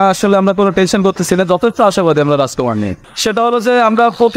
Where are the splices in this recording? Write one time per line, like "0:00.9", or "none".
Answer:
0:03.1